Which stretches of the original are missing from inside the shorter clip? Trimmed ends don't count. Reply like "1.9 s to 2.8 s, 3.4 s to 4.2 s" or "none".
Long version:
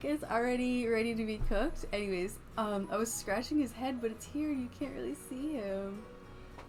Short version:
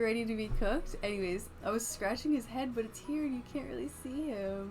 2.5 s to 2.9 s